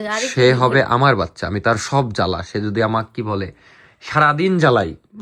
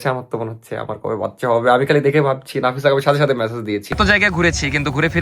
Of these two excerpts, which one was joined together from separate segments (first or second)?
second